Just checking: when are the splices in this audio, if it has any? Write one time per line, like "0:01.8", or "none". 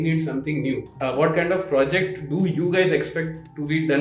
0:00.9